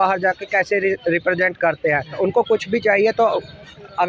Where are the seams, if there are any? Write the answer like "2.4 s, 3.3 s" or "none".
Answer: 2.2 s

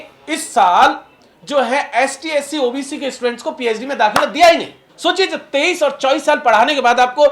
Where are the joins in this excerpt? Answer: 4.8 s

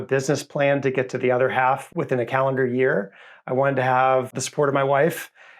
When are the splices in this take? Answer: 1.9 s, 4.3 s

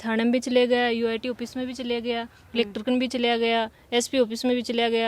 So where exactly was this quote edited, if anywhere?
none

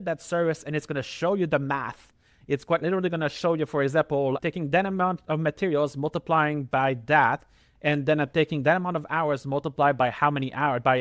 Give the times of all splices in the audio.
none

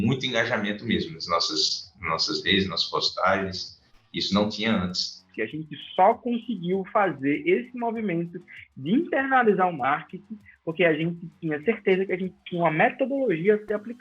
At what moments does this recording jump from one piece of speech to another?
5.3 s

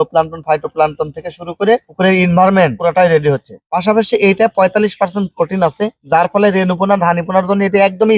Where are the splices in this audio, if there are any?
none

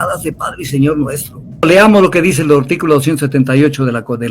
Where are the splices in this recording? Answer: 1.6 s

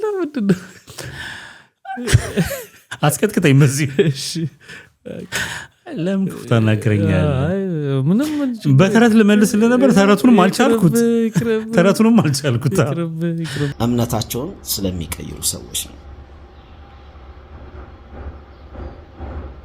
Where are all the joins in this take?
13.7 s

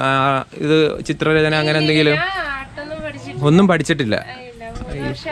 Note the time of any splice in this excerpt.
none

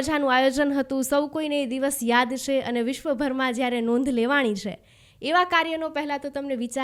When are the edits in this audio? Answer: none

